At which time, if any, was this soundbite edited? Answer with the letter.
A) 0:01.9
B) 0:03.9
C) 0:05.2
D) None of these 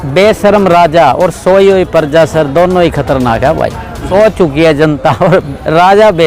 B